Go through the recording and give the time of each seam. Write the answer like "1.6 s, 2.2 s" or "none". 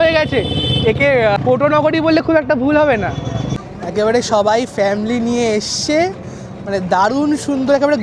none